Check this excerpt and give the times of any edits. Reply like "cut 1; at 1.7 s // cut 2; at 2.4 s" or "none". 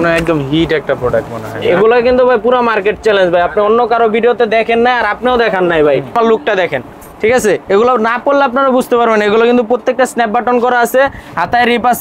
cut 1; at 6.1 s

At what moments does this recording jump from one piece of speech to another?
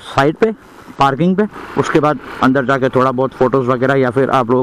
none

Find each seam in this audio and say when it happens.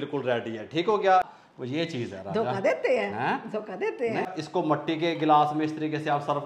cut 1; at 1.4 s // cut 2; at 4.4 s

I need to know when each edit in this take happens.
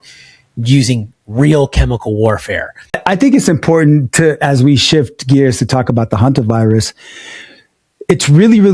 cut 1; at 3.0 s

